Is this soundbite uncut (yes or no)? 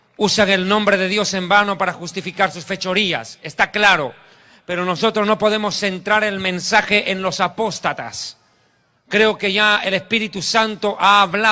no